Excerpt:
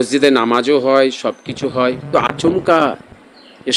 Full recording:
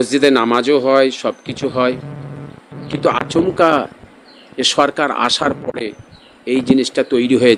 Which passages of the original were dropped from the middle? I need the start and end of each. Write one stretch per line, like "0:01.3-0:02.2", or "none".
0:02.1-0:03.0